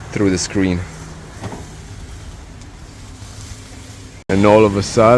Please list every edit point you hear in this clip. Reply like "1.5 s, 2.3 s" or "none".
4.1 s